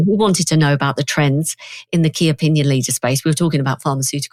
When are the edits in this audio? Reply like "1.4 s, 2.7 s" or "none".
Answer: none